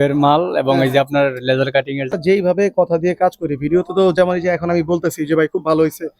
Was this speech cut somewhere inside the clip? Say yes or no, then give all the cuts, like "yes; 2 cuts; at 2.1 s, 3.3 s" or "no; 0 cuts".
yes; 1 cut; at 2.1 s